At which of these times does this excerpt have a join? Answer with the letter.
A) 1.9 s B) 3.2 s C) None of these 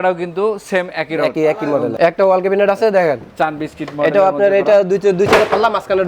A